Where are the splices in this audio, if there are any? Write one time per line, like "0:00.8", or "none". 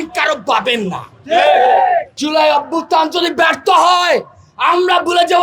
0:02.2

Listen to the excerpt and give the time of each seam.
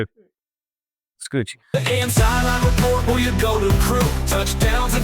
0:01.6

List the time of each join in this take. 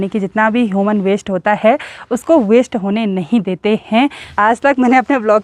0:04.2

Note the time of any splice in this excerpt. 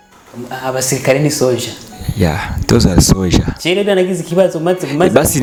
none

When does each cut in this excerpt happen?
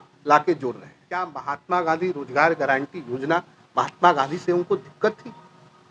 0:01.4

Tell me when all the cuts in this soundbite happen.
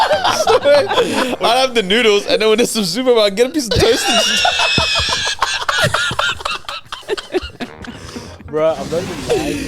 none

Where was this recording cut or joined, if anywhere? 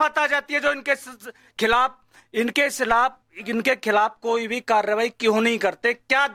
none

